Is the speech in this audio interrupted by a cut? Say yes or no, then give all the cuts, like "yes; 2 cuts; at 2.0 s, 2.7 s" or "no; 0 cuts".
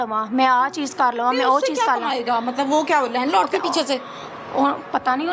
no; 0 cuts